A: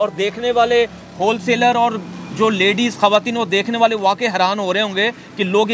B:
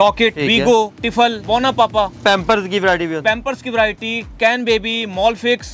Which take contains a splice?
B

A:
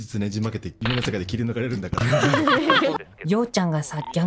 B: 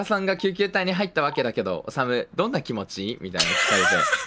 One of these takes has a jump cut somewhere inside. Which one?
A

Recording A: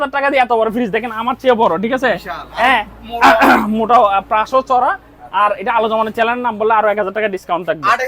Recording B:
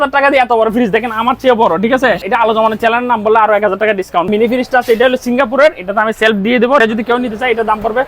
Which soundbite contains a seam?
B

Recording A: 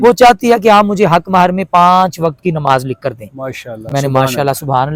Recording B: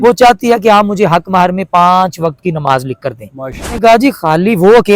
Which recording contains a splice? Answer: B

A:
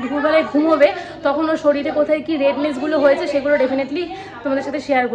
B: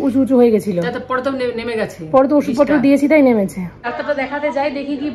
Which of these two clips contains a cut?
B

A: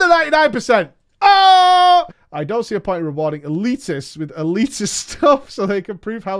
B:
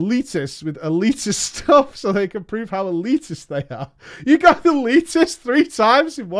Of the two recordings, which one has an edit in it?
A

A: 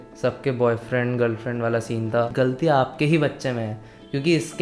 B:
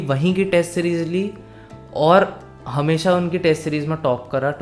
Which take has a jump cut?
A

